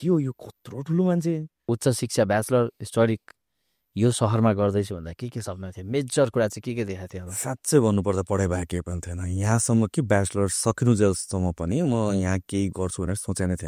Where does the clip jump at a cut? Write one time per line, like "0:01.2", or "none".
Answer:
0:01.7